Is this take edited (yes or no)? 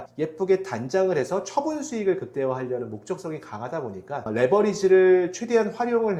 no